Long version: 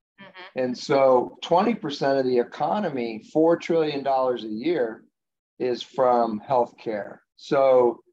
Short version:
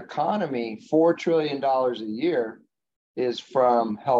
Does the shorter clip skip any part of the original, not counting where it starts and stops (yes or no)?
no